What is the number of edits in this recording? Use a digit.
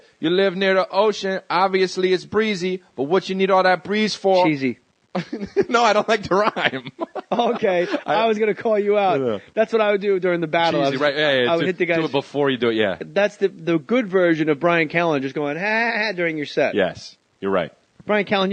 1